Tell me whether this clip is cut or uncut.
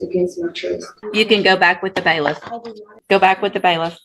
cut